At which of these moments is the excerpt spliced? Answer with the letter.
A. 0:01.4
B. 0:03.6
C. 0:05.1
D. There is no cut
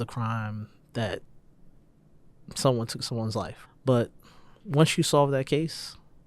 B